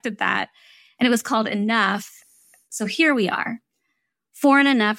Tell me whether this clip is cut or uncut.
cut